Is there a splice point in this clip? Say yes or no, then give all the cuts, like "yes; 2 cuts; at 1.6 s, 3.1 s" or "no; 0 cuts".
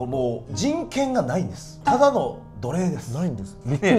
no; 0 cuts